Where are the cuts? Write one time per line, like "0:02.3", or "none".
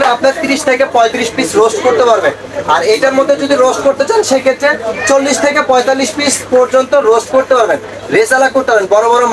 none